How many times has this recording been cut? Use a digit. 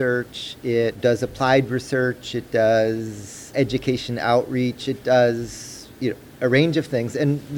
2